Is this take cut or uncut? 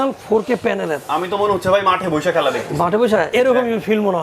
cut